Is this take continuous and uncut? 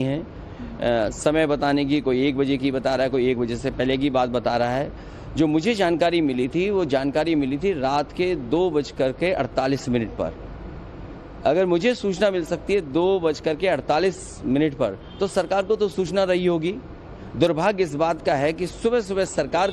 yes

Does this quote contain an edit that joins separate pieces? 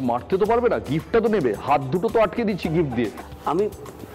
yes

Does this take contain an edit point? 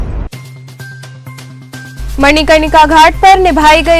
no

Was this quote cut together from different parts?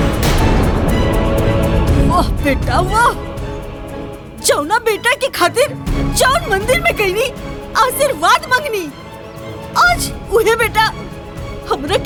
no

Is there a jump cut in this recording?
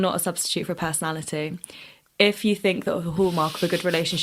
no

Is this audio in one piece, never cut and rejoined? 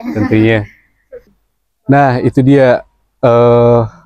no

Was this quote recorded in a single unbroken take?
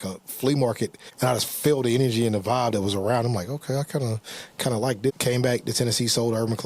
no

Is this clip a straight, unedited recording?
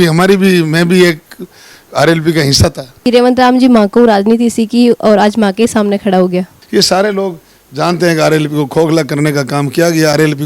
no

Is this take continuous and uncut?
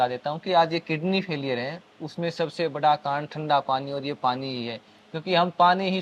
yes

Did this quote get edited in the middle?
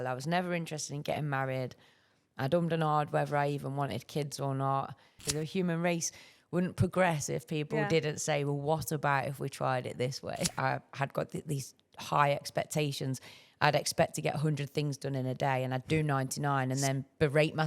yes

